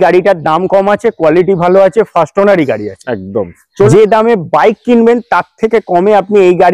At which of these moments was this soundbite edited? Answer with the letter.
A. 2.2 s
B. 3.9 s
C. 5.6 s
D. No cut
B